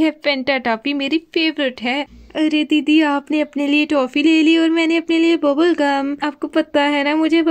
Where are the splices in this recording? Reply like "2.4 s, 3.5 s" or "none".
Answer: 2.2 s